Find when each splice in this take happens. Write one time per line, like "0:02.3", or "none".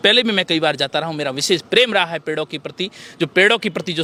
none

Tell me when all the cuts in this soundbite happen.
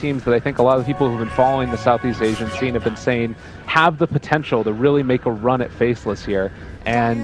none

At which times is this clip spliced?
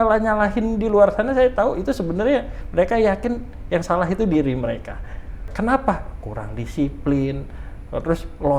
0:05.5

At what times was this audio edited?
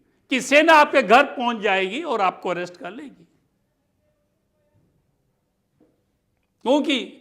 none

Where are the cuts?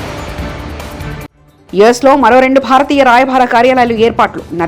0:00.9
0:01.5

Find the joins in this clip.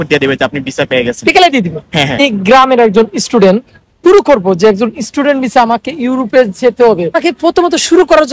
0:02.2
0:04.0
0:07.2

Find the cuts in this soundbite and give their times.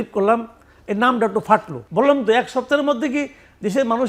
0:01.8

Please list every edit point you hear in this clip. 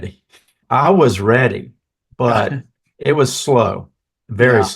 0:02.9

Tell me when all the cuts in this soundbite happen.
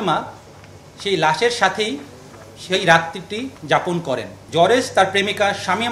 0:04.3

